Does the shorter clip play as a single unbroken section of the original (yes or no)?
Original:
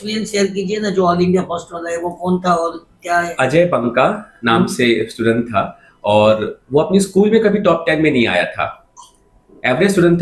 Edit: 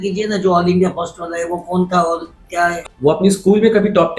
no